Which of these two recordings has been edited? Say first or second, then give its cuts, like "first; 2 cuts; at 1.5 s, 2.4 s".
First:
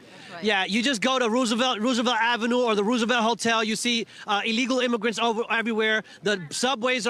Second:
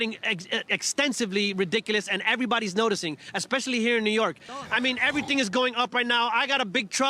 second; 1 cut; at 4.5 s